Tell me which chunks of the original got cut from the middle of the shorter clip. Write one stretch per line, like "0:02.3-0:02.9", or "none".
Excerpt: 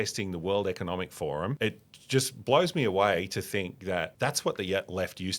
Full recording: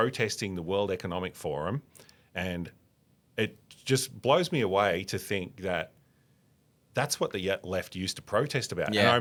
0:01.8-0:03.3
0:05.9-0:06.9